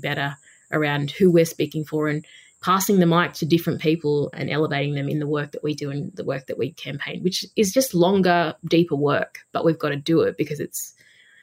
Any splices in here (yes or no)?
no